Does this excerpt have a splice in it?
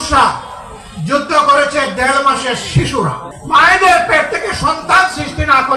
yes; 1 cut; at 3.3 s

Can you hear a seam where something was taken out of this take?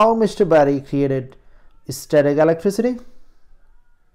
no; 0 cuts

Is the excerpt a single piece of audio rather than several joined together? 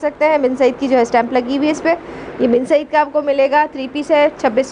yes; 0 cuts

